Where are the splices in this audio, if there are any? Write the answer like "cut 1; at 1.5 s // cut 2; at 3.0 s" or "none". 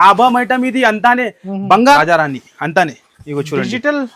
cut 1; at 2.0 s